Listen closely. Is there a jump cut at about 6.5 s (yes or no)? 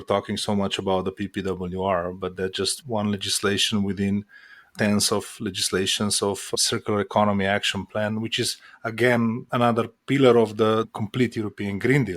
yes